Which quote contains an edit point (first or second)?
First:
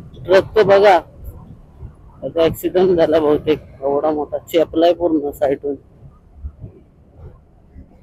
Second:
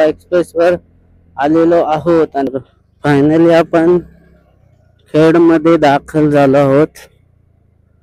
second